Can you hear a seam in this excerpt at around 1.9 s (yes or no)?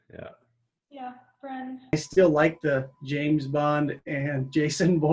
yes